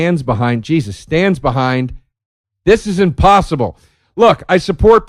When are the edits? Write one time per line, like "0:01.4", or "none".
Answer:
0:02.1